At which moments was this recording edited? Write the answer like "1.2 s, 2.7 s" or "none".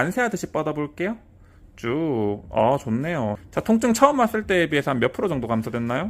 3.4 s